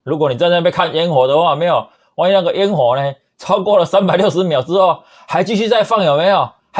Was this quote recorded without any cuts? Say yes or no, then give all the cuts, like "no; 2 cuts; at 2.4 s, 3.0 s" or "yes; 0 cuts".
yes; 0 cuts